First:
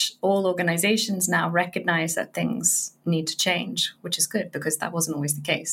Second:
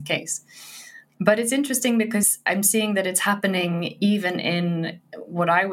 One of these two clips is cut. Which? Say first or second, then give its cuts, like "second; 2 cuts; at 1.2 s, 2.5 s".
second; 1 cut; at 2.4 s